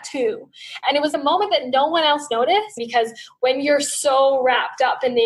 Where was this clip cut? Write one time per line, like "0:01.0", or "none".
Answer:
0:00.8
0:02.8